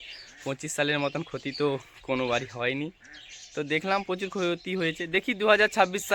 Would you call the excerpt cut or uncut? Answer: uncut